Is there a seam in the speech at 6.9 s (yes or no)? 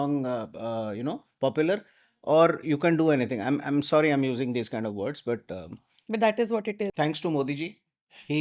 yes